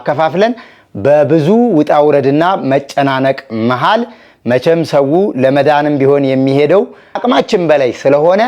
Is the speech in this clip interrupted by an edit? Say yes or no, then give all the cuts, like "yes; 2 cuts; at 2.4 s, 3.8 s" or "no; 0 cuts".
yes; 1 cut; at 7.2 s